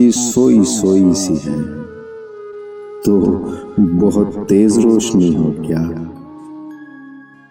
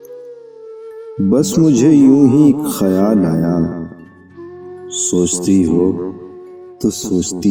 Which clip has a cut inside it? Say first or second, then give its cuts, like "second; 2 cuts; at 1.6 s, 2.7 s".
second; 1 cut; at 1.0 s